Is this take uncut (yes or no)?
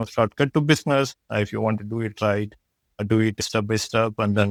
yes